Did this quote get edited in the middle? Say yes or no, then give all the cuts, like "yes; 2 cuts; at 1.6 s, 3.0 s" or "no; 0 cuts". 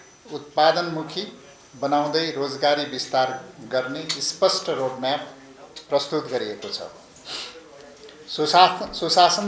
no; 0 cuts